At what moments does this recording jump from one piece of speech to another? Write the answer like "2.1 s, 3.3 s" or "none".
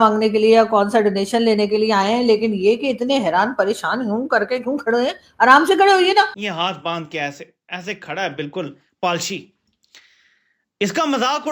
6.4 s